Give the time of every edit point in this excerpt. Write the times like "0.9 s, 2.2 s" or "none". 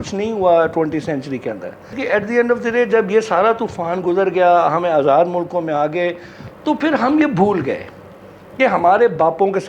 2.0 s